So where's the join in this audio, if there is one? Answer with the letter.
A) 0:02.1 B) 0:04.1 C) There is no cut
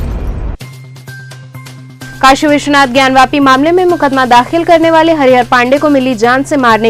A